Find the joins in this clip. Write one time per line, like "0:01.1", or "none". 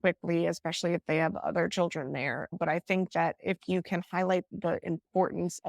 0:04.5